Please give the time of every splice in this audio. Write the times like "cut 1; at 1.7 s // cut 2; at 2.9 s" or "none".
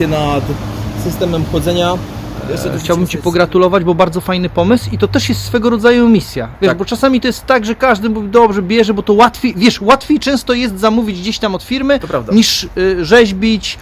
cut 1; at 2.8 s